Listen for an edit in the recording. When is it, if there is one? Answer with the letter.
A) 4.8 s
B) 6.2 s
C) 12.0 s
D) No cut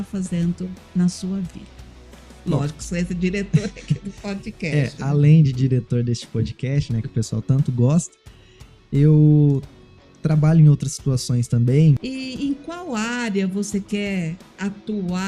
C